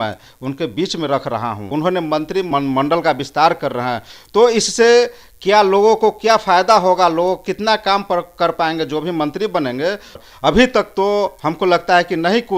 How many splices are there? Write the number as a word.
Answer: three